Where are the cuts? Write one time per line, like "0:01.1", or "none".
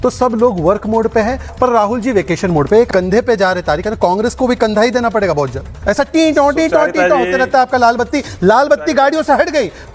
0:02.9
0:05.7